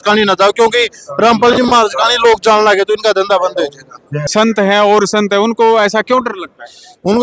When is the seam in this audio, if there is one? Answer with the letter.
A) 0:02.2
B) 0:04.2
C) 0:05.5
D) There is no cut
B